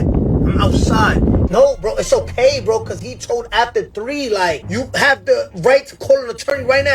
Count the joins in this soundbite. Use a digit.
2